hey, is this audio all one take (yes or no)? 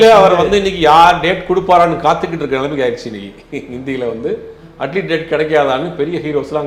yes